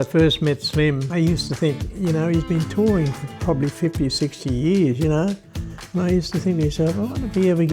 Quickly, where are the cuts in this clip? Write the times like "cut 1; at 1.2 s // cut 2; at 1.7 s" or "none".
cut 1; at 1.0 s // cut 2; at 3.3 s